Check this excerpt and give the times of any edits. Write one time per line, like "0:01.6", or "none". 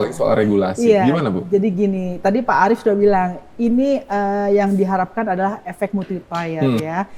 none